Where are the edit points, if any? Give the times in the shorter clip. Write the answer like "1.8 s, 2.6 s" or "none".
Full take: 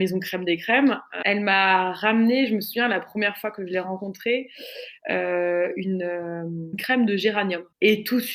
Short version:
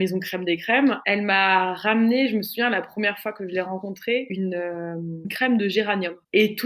1.0 s, 4.3 s